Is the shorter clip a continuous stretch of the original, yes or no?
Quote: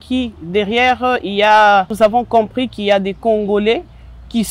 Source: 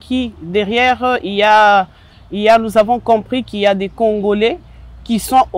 no